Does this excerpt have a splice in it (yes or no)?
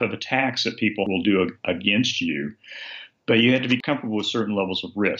yes